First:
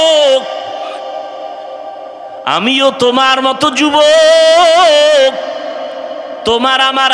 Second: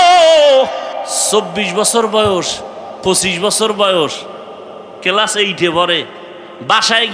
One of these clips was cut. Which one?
second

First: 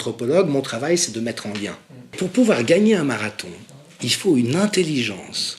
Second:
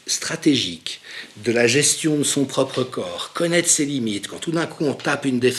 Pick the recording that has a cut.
first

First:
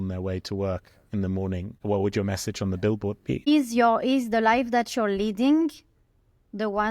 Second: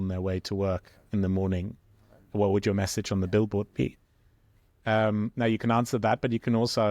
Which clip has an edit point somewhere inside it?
first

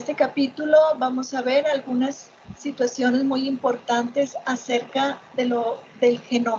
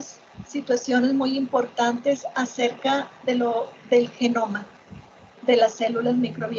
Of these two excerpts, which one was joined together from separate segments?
first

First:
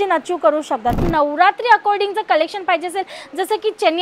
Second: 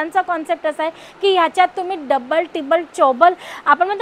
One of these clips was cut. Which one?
first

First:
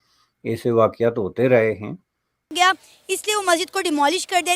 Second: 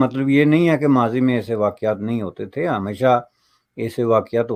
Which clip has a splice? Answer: first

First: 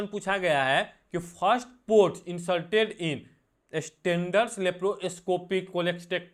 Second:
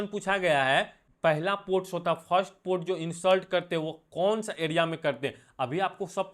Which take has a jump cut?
second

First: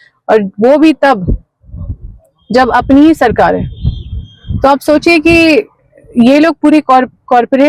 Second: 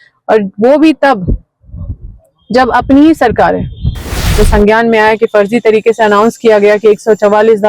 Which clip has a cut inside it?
second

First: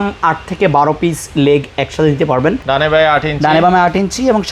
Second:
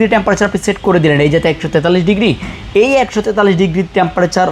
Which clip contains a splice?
first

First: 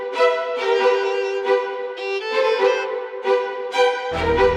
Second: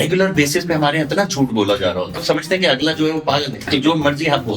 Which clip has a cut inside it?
second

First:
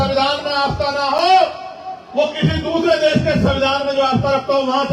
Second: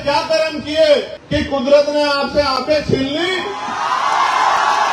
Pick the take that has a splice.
second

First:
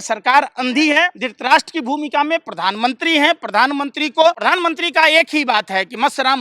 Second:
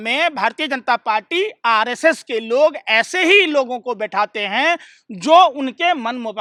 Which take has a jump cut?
first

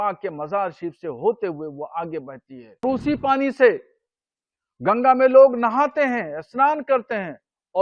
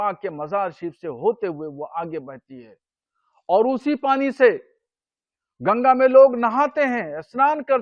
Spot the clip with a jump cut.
first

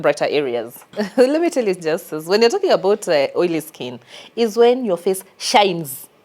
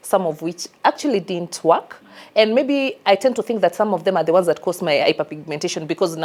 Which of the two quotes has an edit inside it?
first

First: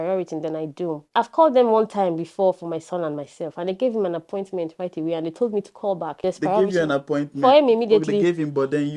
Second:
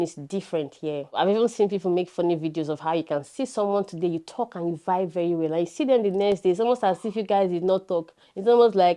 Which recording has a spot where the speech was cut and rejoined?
first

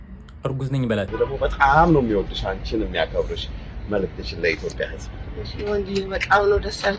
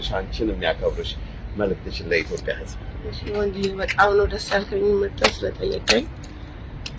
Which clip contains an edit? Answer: first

